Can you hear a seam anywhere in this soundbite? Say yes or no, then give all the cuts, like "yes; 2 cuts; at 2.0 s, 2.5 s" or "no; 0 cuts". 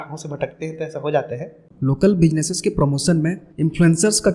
yes; 2 cuts; at 1.6 s, 3.5 s